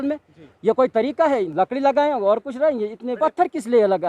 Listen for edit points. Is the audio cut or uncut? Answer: cut